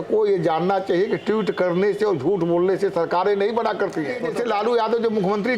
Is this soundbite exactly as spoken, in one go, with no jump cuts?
no; 1 cut; at 4.2 s

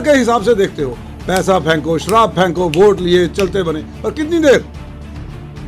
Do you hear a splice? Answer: no; 0 cuts

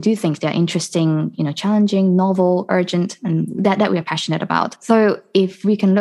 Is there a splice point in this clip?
yes; 1 cut; at 4.8 s

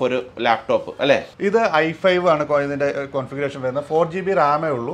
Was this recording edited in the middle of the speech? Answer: yes; 1 cut; at 1.3 s

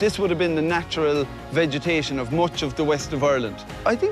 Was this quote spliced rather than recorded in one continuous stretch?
no; 0 cuts

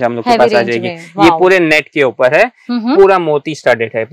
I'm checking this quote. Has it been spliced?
no; 0 cuts

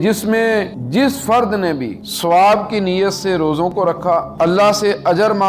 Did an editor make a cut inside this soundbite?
no; 0 cuts

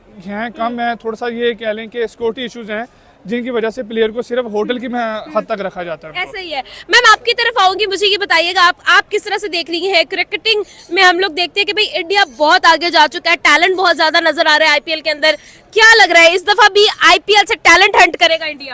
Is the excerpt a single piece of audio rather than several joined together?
yes; 0 cuts

